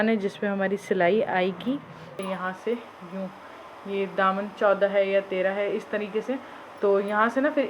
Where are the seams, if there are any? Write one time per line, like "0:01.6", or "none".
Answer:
0:02.1